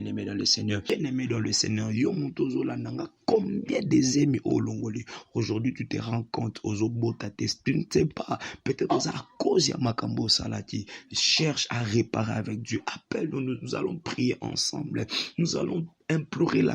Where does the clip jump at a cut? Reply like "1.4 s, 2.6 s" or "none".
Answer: 0.9 s